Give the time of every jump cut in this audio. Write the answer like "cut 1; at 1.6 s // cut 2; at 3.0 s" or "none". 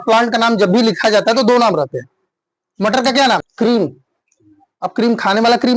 cut 1; at 3.5 s